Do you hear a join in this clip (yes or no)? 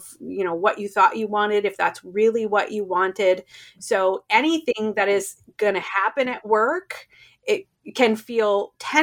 no